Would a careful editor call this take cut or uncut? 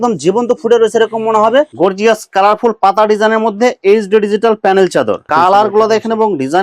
cut